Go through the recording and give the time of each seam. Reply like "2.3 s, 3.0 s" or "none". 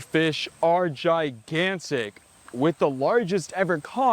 none

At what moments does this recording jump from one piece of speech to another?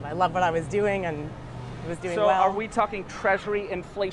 none

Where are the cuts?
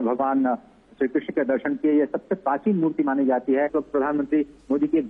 3.7 s

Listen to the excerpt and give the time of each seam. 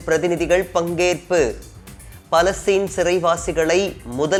none

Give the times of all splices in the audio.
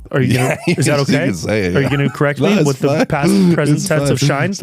2.1 s

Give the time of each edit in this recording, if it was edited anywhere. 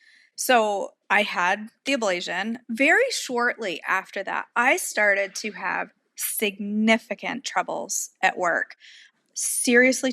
1.4 s, 2.6 s

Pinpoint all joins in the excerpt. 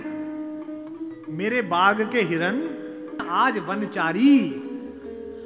3.3 s

